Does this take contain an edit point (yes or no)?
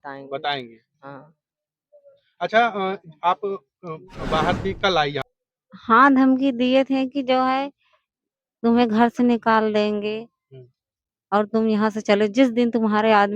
yes